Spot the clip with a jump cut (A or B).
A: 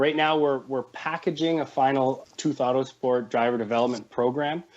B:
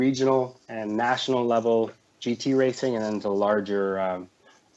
A